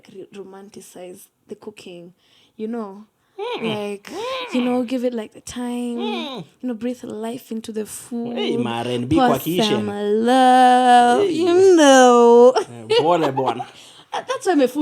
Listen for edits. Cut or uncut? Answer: uncut